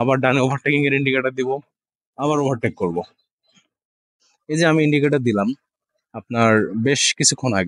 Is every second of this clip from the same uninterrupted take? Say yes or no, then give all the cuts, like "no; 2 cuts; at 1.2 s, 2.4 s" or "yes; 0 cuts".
no; 1 cut; at 4.1 s